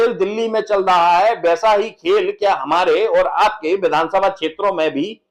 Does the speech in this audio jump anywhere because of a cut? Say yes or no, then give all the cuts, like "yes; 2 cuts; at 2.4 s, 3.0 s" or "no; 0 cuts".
no; 0 cuts